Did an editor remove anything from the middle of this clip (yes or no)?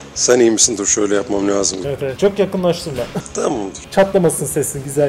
yes